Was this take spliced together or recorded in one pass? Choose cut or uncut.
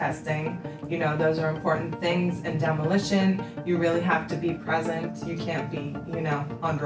uncut